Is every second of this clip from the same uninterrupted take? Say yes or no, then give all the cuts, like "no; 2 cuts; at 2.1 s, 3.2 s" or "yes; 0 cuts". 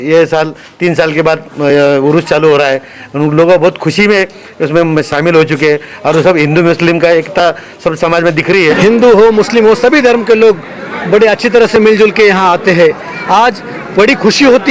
no; 1 cut; at 8.8 s